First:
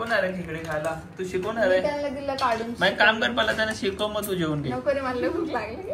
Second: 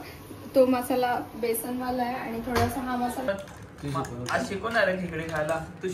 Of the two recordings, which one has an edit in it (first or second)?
second